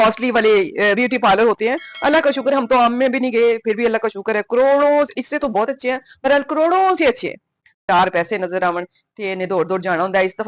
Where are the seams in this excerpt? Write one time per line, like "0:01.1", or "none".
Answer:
0:07.8